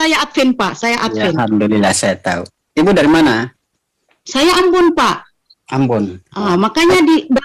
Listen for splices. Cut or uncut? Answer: uncut